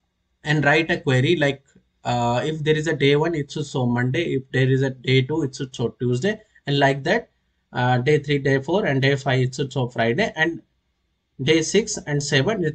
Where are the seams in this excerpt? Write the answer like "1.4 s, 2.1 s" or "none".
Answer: none